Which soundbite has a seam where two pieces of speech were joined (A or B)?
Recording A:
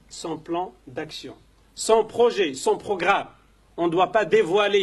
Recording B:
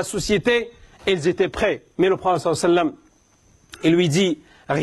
B